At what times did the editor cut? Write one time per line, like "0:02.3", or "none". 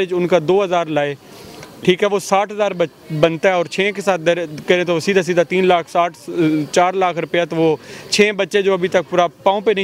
none